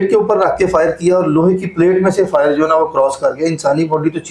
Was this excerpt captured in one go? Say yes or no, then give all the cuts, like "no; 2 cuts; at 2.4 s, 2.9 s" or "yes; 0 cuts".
yes; 0 cuts